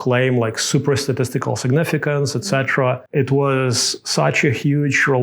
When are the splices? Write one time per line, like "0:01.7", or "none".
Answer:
0:03.0